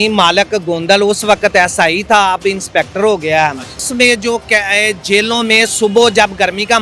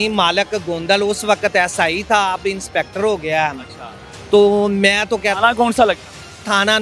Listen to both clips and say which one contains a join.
first; 1 cut; at 3.9 s

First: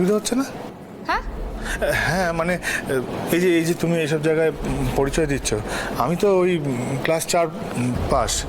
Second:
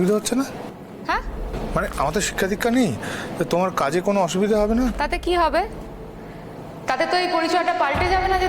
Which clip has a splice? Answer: second; 2 cuts; at 1.5 s, 4.9 s

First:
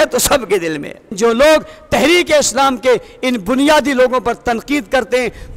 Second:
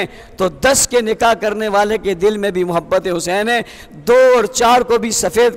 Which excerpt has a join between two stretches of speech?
first; 1 cut; at 1.1 s

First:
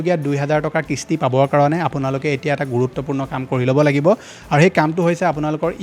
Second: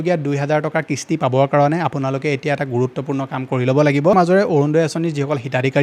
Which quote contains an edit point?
second; 1 cut; at 4.1 s

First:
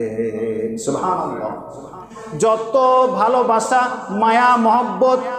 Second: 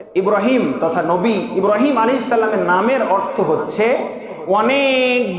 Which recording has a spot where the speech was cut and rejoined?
first; 1 cut; at 2.2 s

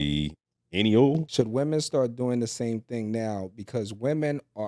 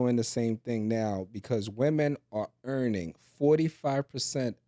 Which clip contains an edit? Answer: first; 1 cut; at 1.3 s

